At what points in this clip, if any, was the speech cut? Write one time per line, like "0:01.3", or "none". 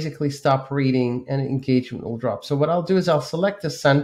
none